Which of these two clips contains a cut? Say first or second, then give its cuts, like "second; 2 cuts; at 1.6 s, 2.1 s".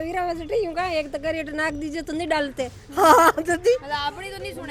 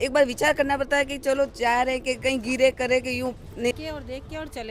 second; 1 cut; at 3.7 s